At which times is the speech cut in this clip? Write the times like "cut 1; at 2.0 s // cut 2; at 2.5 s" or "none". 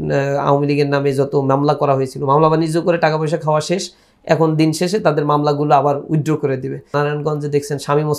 cut 1; at 6.9 s